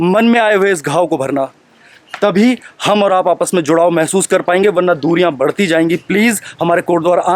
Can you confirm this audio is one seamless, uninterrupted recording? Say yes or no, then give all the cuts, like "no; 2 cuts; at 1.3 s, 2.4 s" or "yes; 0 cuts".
yes; 0 cuts